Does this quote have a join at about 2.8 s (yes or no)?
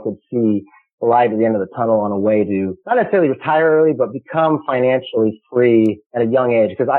yes